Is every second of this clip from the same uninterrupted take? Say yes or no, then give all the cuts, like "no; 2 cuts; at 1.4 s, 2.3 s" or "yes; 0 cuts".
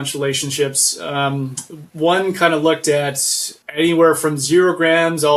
yes; 0 cuts